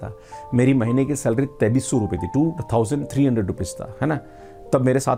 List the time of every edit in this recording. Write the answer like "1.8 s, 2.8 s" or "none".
none